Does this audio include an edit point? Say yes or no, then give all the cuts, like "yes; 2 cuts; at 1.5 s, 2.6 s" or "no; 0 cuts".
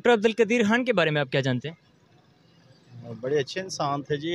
no; 0 cuts